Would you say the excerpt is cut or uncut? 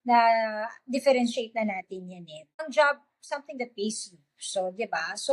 cut